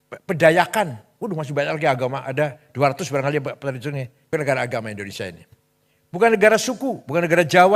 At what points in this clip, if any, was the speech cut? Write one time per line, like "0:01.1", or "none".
0:04.1